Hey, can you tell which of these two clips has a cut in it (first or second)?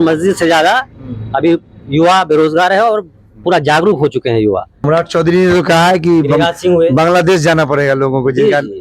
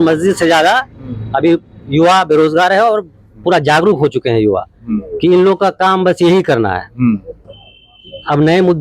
first